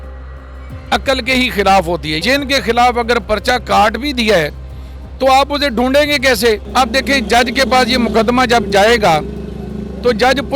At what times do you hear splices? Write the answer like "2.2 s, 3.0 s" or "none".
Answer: 2.2 s, 6.7 s